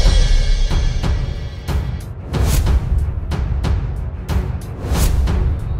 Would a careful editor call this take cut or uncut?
uncut